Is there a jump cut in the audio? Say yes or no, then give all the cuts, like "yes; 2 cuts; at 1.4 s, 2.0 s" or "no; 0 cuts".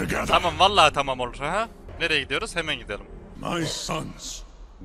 yes; 2 cuts; at 1.9 s, 3.2 s